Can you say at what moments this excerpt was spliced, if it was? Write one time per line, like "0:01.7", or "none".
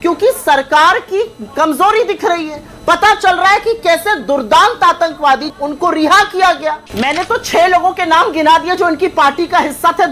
0:05.5
0:06.8